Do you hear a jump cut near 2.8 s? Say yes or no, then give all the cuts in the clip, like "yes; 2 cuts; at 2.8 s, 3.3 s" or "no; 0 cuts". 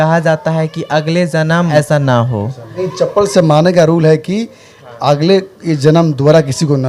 yes; 2 cuts; at 1.7 s, 2.8 s